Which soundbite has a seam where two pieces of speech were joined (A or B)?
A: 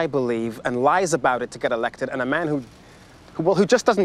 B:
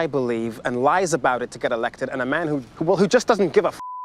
B